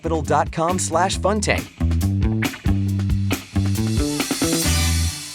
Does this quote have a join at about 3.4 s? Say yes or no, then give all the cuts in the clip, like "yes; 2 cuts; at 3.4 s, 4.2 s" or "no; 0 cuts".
no; 1 cut; at 1.7 s